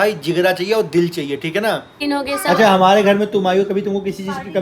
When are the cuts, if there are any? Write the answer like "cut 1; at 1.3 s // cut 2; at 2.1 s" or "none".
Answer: cut 1; at 1.9 s